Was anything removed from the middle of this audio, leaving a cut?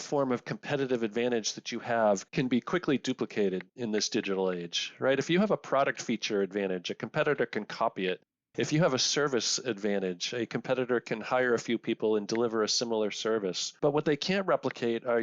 yes; 2 cuts; at 2.3 s, 13.7 s

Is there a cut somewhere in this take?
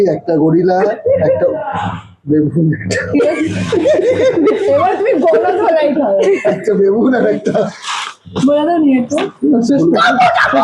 no; 0 cuts

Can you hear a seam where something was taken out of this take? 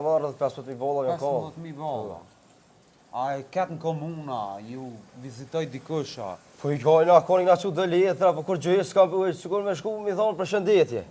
no; 0 cuts

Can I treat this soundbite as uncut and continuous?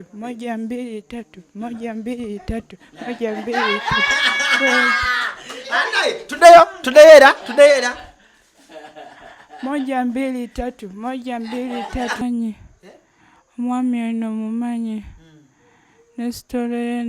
no; 1 cut; at 12.2 s

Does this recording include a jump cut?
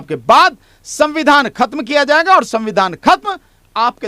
no; 0 cuts

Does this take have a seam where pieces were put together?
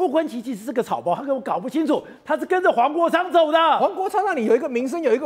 no; 0 cuts

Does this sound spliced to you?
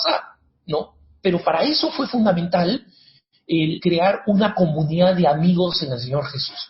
yes; 2 cuts; at 0.9 s, 3.8 s

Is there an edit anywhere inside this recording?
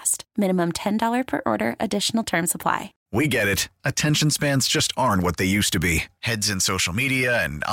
yes; 1 cut; at 2.9 s

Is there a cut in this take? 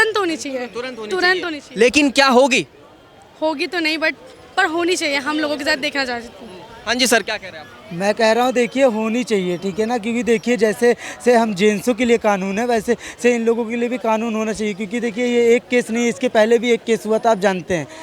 no; 0 cuts

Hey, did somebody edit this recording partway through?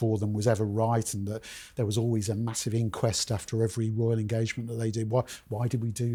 no; 0 cuts

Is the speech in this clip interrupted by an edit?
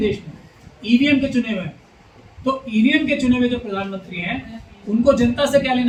no; 0 cuts

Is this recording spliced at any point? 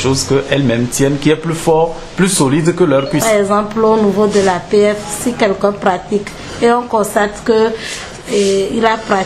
yes; 1 cut; at 3.2 s

